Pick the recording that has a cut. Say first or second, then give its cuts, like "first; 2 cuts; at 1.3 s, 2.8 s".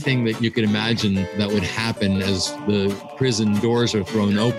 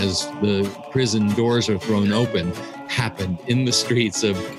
first; 1 cut; at 1.3 s